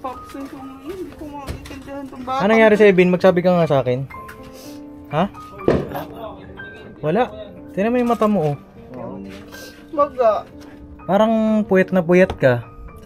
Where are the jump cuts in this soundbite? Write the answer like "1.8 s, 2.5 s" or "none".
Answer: none